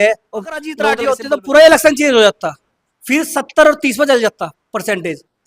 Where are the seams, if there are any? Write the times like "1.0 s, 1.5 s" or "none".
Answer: 0.9 s